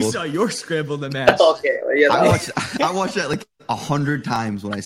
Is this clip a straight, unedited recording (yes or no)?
yes